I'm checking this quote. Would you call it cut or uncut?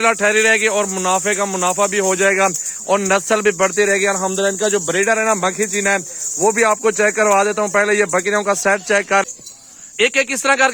cut